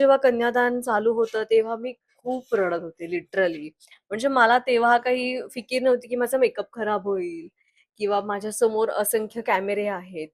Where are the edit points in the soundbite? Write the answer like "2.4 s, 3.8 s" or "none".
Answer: none